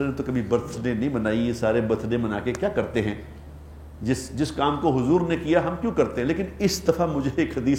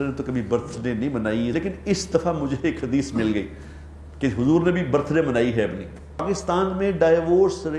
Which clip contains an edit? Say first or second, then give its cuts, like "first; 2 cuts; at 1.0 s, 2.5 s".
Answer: second; 2 cuts; at 1.5 s, 6.2 s